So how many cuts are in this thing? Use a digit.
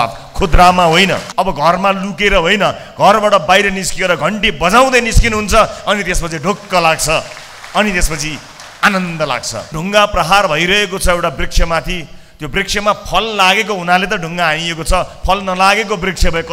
2